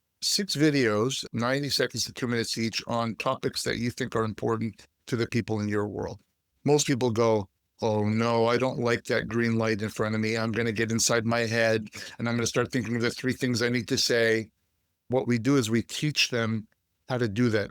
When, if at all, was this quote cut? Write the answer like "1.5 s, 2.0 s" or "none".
1.2 s, 15.1 s